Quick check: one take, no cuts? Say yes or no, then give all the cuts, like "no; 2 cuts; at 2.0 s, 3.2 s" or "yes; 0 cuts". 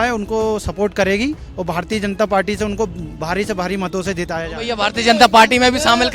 yes; 0 cuts